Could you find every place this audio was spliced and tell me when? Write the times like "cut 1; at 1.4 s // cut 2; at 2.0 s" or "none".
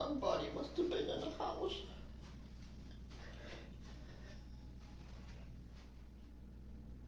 none